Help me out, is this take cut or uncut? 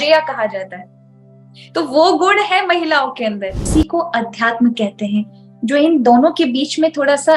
cut